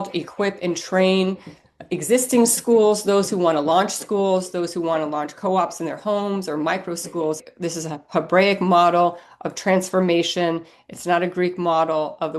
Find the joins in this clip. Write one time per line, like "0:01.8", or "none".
0:07.4